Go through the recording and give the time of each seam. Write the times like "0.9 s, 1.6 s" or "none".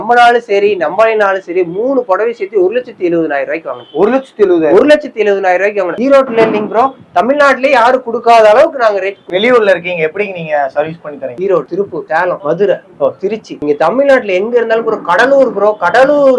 5.9 s, 9.2 s

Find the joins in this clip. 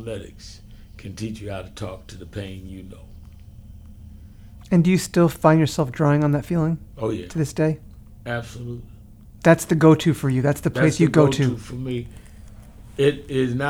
none

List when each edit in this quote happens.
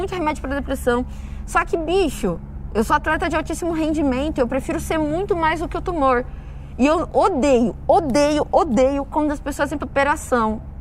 9.8 s

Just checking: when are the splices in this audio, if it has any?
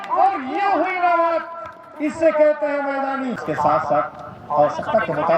3.4 s

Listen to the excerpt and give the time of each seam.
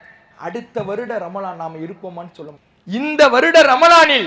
2.7 s

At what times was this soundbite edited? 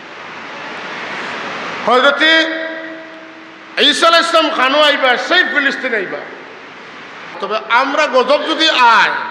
7.4 s

